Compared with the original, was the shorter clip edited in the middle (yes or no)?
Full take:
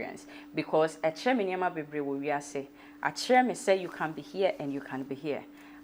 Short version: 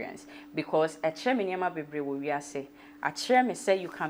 no